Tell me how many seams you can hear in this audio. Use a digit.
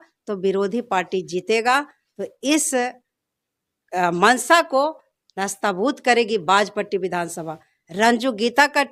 0